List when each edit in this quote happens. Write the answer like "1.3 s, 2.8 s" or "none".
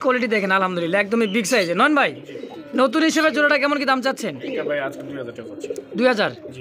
none